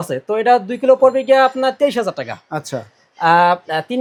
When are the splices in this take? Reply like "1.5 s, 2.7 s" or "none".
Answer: none